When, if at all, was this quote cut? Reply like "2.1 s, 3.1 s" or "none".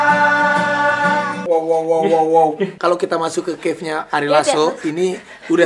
1.4 s, 2.7 s